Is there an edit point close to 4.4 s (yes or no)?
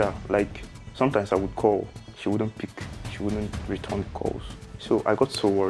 no